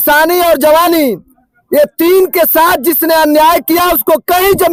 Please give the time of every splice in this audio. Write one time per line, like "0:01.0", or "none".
none